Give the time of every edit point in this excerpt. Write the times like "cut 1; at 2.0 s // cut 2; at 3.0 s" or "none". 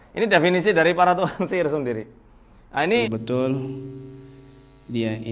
cut 1; at 3.1 s